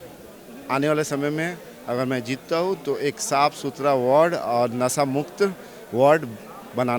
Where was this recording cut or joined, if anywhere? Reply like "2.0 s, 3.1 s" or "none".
none